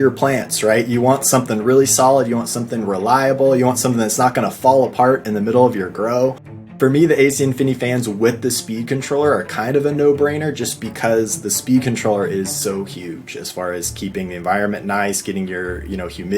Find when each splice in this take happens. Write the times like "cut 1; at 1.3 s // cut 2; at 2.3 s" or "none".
cut 1; at 6.7 s